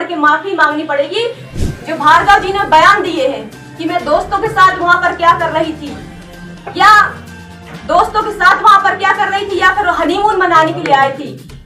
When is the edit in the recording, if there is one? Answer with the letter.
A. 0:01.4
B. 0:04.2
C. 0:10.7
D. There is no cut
A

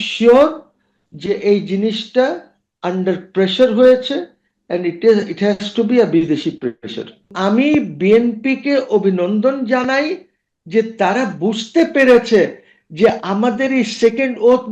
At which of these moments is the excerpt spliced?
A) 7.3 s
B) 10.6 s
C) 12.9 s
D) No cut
A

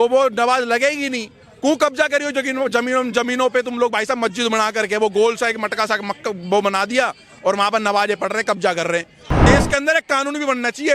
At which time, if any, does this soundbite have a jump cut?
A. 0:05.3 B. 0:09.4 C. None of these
B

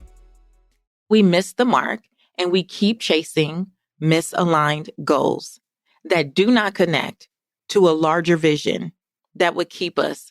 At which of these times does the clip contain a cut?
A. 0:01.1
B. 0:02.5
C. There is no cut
A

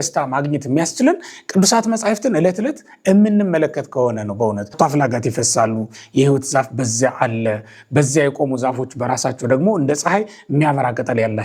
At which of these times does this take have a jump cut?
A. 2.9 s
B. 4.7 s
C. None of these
B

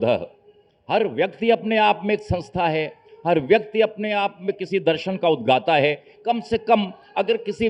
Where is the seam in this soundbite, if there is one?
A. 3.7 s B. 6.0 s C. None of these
C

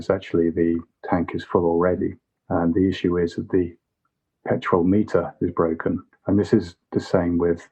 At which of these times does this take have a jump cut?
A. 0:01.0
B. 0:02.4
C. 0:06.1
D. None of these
C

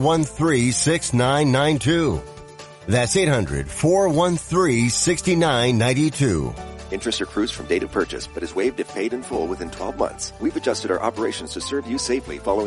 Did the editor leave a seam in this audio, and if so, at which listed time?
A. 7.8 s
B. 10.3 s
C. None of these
B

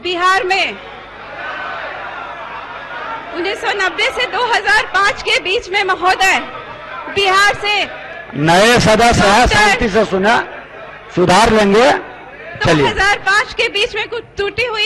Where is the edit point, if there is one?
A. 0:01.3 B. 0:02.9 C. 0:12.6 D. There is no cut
C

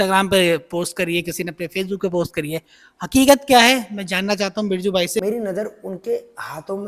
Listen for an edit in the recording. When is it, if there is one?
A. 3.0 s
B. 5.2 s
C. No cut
B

